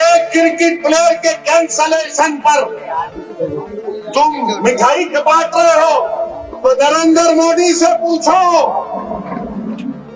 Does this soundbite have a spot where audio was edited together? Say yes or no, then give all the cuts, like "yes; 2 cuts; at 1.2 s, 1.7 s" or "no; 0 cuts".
no; 0 cuts